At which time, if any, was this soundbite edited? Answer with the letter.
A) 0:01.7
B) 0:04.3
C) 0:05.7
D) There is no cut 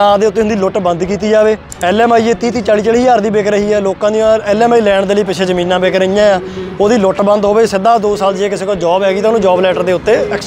A